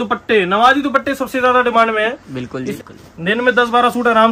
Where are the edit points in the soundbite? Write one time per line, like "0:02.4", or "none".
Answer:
0:02.7

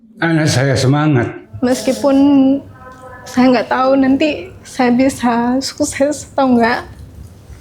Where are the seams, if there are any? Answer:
0:01.4

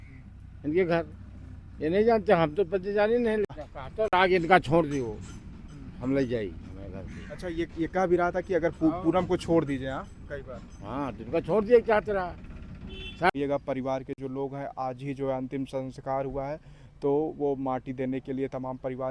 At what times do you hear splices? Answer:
0:03.5
0:13.3

